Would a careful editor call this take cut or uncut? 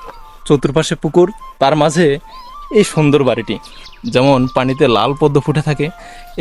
uncut